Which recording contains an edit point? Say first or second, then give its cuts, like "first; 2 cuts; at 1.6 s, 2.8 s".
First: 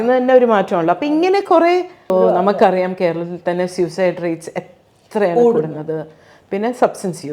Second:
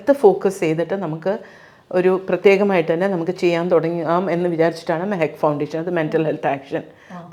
first; 1 cut; at 2.0 s